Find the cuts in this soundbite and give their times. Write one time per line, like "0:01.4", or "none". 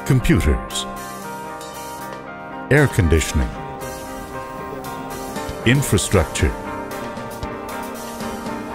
none